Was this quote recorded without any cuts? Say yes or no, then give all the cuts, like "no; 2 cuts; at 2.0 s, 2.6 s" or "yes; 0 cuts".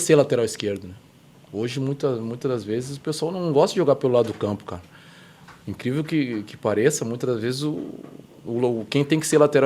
yes; 0 cuts